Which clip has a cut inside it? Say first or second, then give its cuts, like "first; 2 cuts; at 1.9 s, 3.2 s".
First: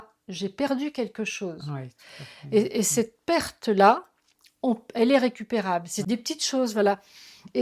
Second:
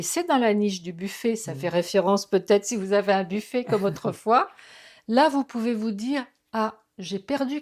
first; 1 cut; at 5.9 s